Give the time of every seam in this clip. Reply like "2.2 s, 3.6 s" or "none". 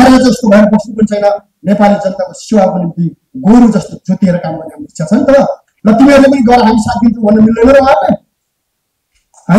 5.7 s

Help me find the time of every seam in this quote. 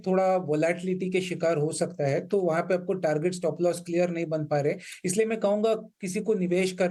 none

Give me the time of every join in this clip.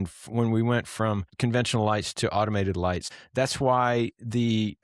1.3 s, 3.1 s

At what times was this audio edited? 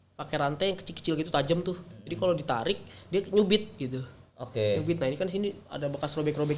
none

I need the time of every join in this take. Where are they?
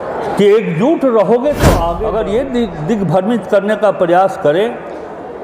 2.0 s

